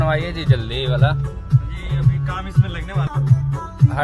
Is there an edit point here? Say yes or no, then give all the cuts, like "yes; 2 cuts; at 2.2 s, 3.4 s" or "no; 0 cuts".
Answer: yes; 1 cut; at 3.1 s